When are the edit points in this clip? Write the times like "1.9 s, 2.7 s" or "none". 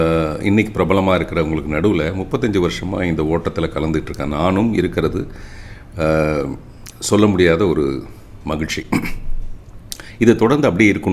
none